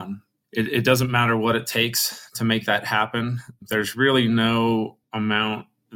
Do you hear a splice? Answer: yes; 1 cut; at 5.0 s

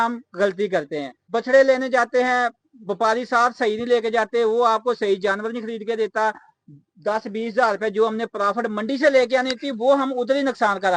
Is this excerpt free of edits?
no; 1 cut; at 1.3 s

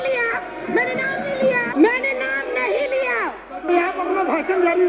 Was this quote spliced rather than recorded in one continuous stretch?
yes; 1 cut; at 1.7 s

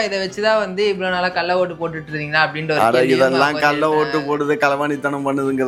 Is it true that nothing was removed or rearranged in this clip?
yes; 0 cuts

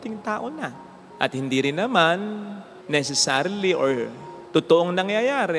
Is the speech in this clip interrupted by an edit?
no; 0 cuts

